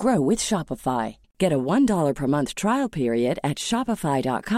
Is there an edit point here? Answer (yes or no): no